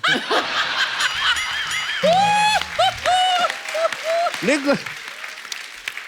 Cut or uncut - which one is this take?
uncut